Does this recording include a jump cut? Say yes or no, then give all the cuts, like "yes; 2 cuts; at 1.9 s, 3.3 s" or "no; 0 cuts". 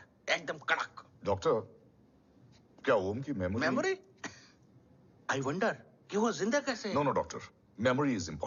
no; 0 cuts